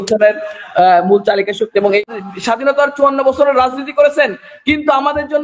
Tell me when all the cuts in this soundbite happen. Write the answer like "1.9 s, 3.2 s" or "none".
2.0 s